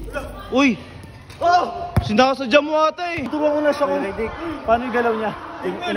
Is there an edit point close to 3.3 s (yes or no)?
yes